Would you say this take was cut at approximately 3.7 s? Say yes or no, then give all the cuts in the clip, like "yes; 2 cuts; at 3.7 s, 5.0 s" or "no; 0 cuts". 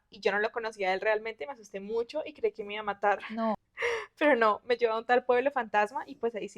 yes; 1 cut; at 3.7 s